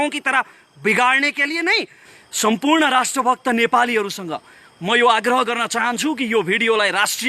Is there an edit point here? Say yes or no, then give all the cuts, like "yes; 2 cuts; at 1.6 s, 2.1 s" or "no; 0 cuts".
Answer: yes; 1 cut; at 2.0 s